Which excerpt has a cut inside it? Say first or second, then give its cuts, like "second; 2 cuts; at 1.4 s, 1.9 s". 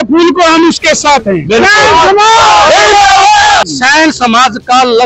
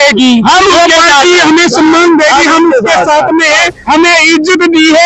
first; 1 cut; at 3.6 s